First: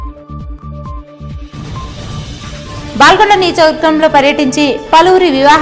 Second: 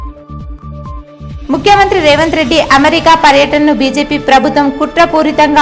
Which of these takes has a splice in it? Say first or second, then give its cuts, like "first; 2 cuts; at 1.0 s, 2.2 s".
second; 1 cut; at 1.4 s